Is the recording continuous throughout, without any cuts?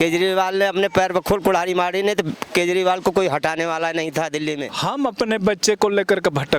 no; 1 cut; at 4.7 s

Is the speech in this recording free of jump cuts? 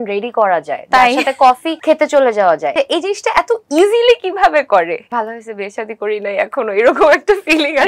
no; 3 cuts; at 1.7 s, 2.7 s, 5.0 s

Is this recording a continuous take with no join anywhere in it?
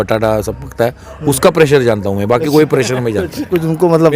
yes; 0 cuts

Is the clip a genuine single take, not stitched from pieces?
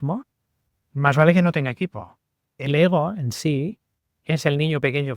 no; 1 cut; at 2.6 s

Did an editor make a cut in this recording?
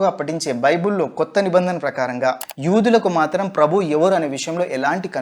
yes; 1 cut; at 2.4 s

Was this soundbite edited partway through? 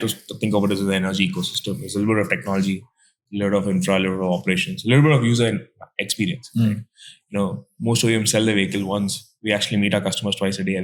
no; 0 cuts

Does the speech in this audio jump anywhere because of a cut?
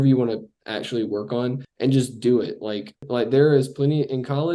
yes; 2 cuts; at 1.7 s, 3.1 s

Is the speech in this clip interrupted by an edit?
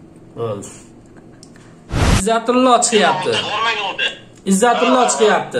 yes; 1 cut; at 2.2 s

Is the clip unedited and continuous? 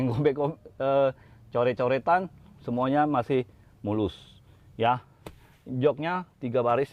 yes; 0 cuts

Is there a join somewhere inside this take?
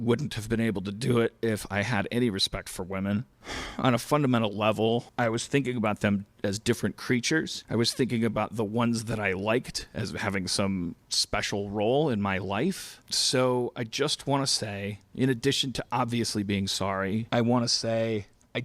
yes; 3 cuts; at 5.1 s, 12.9 s, 17.2 s

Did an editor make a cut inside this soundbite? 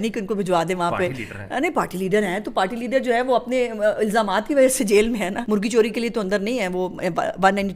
no; 0 cuts

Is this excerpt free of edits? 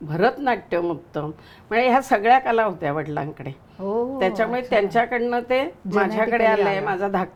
yes; 0 cuts

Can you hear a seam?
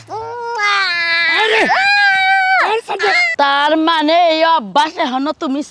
yes; 1 cut; at 3.3 s

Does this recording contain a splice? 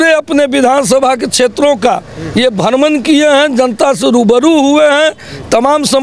no; 0 cuts

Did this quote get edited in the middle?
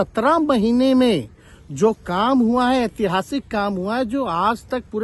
no; 0 cuts

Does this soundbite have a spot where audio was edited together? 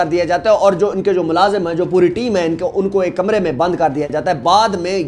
no; 0 cuts

